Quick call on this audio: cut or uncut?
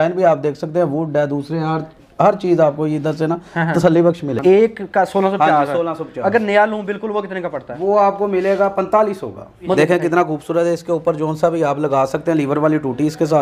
cut